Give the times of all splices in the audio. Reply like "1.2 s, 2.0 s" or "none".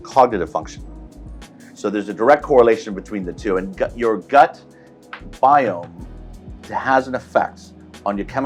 none